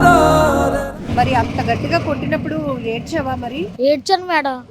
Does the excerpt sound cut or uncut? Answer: cut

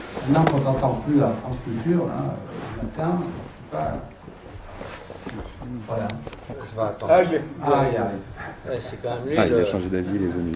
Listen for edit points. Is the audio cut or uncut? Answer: cut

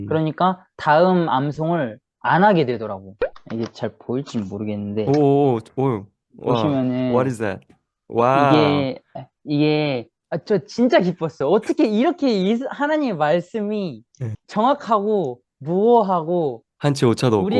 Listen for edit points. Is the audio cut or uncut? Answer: cut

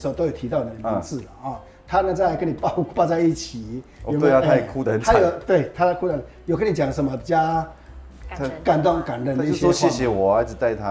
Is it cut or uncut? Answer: uncut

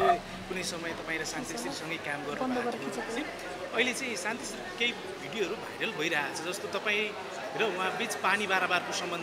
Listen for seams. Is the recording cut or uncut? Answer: uncut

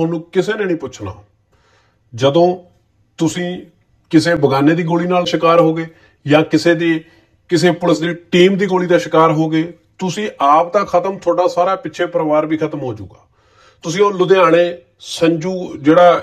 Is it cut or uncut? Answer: cut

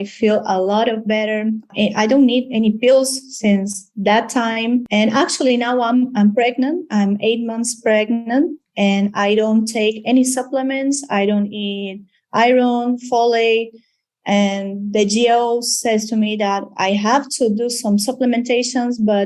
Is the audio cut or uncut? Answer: cut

